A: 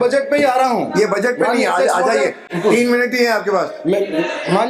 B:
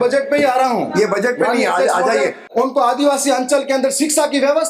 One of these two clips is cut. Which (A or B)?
B